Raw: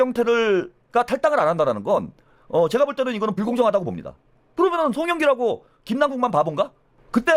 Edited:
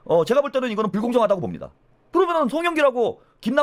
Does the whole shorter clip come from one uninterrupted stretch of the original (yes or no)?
yes